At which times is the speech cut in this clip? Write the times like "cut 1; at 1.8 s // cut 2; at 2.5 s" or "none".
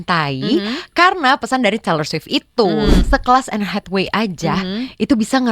cut 1; at 3.0 s